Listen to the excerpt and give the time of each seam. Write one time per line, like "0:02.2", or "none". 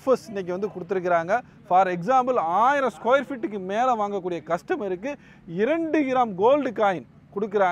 none